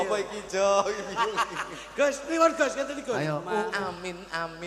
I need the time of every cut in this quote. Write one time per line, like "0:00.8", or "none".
0:03.7